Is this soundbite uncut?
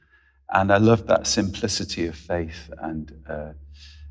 yes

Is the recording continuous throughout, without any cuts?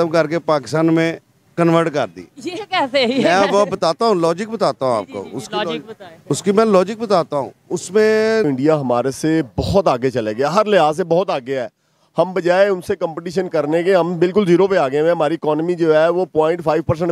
no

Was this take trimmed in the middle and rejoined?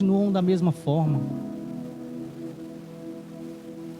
no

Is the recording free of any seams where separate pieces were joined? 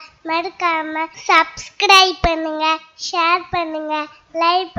no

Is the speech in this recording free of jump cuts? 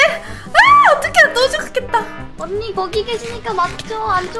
no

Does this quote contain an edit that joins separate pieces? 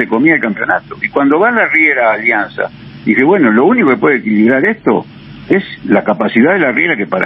no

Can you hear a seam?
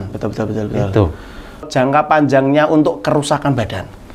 yes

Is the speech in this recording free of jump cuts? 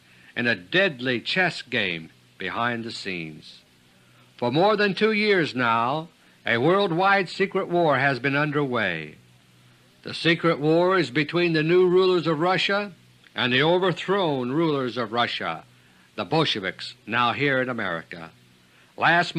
yes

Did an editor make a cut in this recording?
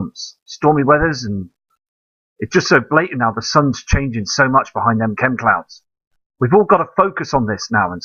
yes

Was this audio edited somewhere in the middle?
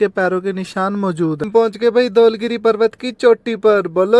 yes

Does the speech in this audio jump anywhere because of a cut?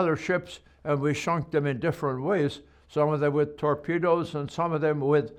no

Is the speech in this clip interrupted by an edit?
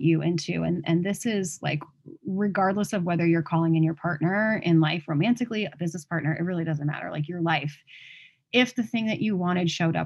no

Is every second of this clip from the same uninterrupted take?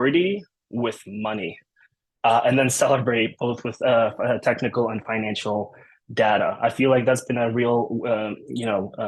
yes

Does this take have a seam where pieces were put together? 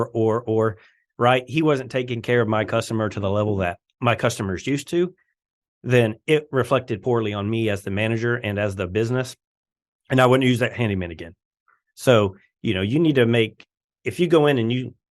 yes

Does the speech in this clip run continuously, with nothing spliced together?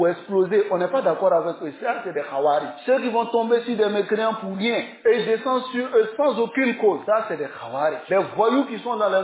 yes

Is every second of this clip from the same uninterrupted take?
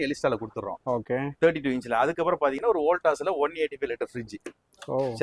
yes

